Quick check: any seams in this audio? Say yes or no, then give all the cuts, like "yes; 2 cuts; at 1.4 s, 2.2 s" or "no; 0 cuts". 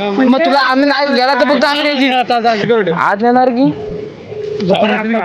yes; 1 cut; at 2.6 s